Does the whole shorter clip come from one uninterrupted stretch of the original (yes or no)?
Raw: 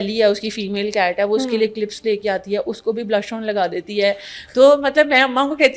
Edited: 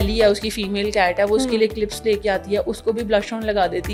yes